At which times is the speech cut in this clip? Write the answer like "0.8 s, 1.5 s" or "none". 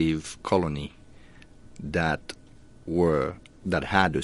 none